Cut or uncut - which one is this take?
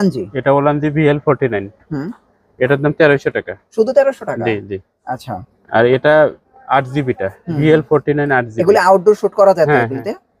uncut